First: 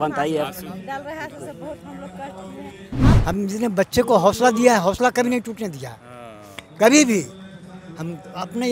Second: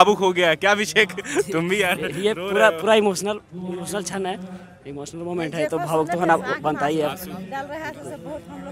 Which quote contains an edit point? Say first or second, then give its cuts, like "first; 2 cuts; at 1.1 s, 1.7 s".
first; 1 cut; at 3.0 s